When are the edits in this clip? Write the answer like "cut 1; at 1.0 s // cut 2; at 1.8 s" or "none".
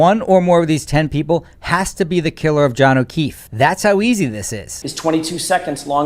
cut 1; at 4.7 s